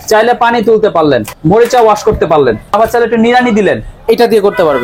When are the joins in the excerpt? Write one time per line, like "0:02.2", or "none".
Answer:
0:01.3
0:02.7